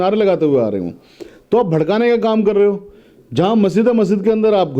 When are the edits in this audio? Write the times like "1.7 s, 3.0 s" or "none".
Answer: none